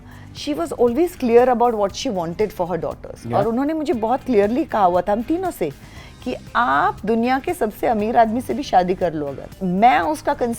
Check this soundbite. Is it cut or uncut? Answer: uncut